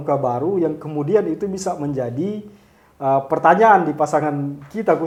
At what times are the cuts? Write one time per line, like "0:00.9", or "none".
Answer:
none